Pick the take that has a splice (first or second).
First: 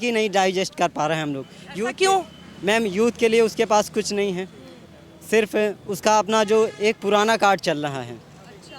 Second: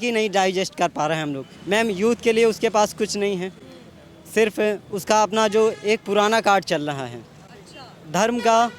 second